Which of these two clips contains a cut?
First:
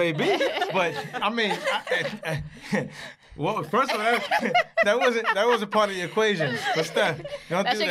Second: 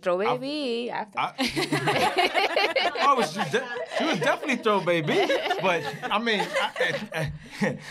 first; 1 cut; at 4.4 s

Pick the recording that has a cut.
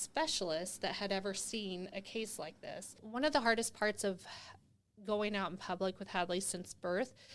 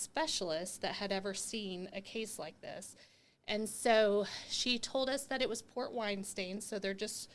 first; 1 cut; at 3.0 s

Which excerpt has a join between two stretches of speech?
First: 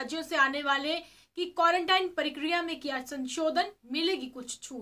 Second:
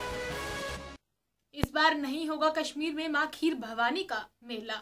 second; 1 cut; at 0.9 s

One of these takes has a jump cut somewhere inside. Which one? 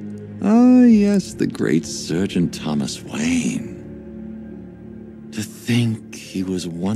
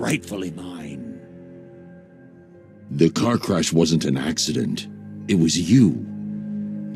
second; 2 cuts; at 1.2 s, 2.9 s

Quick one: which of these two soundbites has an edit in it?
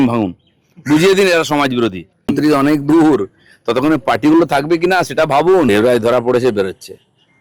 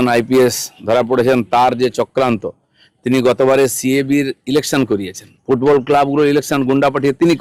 first; 2 cuts; at 2.2 s, 5.7 s

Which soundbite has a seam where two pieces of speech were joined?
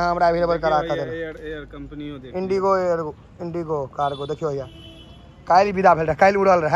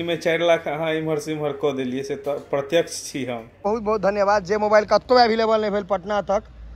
second; 1 cut; at 3.6 s

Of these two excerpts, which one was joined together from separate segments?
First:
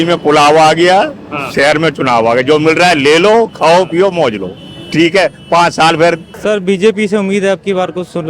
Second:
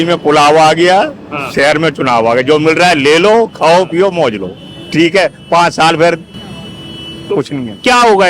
first; 1 cut; at 6.3 s

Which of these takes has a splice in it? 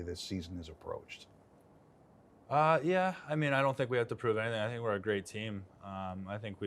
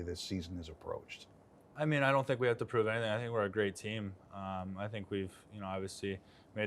second; 1 cut; at 1.7 s

